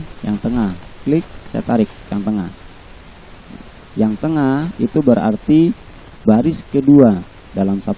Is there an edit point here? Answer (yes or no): no